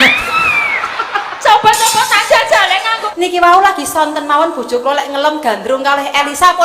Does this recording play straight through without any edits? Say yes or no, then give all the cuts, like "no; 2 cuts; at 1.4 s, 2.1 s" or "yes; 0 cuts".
no; 1 cut; at 3.1 s